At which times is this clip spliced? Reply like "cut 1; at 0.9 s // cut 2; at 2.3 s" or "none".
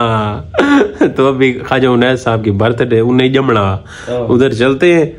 none